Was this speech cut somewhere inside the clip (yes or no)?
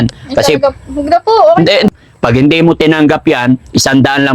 yes